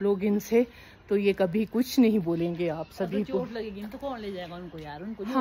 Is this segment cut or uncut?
uncut